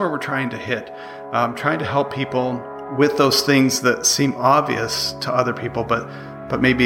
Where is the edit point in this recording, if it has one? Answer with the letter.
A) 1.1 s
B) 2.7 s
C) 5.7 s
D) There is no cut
B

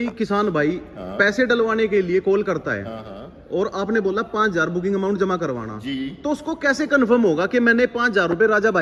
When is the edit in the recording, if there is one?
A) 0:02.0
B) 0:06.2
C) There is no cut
C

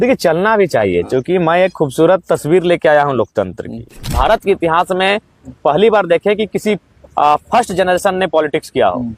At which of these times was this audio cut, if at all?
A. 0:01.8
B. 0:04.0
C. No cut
B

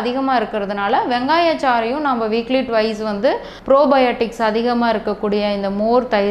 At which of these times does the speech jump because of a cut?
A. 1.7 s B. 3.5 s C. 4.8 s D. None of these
B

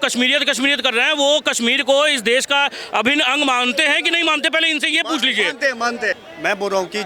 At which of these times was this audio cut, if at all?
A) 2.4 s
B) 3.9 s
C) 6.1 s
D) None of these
C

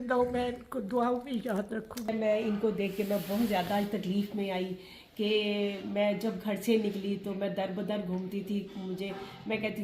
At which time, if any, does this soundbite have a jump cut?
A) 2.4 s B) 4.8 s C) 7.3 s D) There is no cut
A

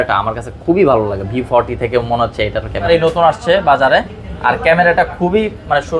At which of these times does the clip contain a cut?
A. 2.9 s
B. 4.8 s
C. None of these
A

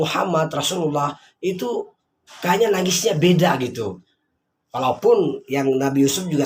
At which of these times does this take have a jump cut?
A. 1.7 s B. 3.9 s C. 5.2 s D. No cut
D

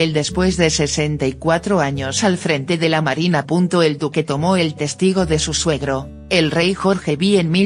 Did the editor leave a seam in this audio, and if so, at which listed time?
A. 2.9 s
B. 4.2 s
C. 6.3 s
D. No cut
C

